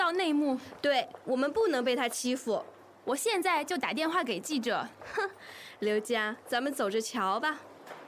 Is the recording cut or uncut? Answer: uncut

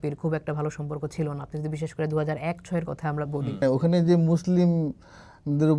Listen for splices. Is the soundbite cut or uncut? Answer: cut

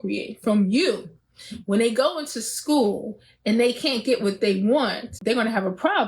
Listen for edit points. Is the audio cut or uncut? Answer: cut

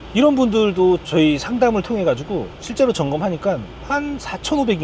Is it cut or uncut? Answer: cut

